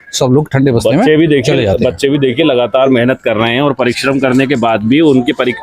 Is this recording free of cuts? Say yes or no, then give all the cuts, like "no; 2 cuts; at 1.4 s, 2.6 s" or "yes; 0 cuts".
yes; 0 cuts